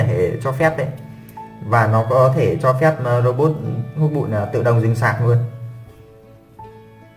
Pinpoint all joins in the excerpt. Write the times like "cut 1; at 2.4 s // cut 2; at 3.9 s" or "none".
cut 1; at 6.2 s